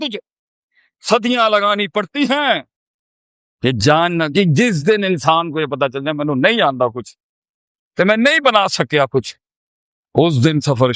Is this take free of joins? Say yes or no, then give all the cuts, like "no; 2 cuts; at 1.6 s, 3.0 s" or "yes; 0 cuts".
no; 1 cut; at 3.0 s